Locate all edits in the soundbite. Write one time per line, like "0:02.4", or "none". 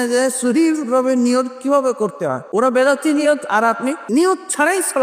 0:02.4
0:04.0